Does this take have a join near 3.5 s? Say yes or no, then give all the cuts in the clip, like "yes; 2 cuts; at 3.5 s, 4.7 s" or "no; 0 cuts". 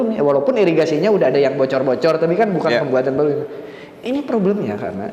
no; 0 cuts